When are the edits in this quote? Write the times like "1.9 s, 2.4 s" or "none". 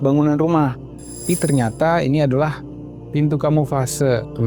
1.2 s